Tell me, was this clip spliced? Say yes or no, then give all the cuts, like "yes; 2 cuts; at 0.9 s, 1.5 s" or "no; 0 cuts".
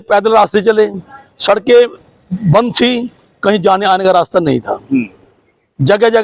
no; 0 cuts